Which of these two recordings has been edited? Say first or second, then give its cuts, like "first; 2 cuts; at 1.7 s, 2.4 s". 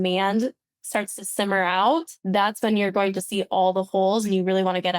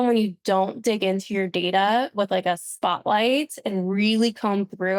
first; 1 cut; at 2.1 s